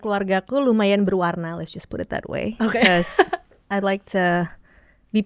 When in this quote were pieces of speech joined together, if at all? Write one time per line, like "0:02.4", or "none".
none